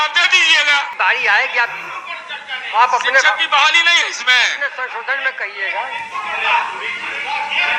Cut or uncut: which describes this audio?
cut